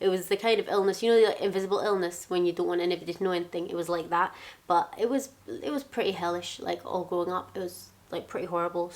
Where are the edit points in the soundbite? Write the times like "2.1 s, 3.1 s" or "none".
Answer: none